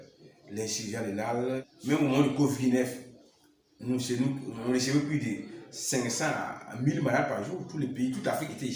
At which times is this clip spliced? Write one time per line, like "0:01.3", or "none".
0:01.7